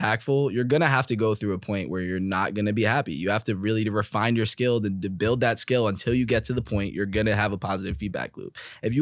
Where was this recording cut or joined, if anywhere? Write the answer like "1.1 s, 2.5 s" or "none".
none